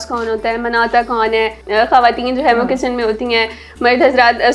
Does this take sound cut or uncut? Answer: cut